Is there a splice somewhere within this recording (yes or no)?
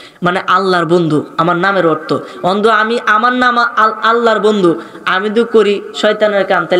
no